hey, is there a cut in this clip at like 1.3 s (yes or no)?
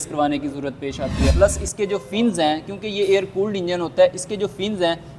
yes